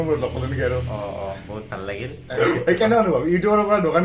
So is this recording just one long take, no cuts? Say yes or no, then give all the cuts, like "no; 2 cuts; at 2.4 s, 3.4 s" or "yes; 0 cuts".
no; 1 cut; at 2.3 s